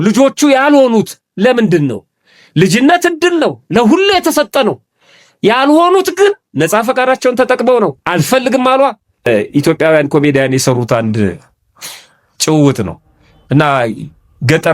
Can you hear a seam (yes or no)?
yes